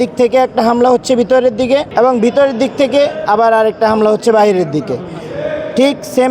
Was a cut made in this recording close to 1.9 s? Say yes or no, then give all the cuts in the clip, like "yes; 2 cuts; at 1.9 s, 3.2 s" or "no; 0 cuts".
yes; 1 cut; at 1.9 s